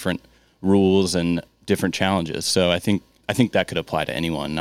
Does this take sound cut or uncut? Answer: cut